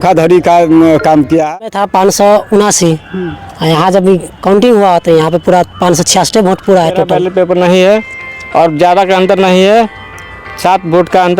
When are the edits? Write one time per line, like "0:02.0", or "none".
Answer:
0:01.6
0:07.1